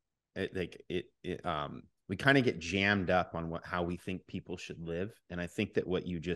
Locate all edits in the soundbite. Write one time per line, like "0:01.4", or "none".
none